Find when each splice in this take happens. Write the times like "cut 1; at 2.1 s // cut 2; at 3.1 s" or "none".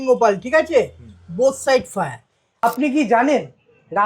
cut 1; at 2.6 s